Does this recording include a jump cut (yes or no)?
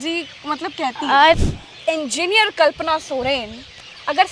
yes